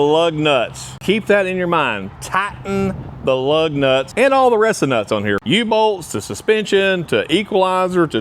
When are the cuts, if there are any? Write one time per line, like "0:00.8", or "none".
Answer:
0:00.9
0:04.1
0:05.4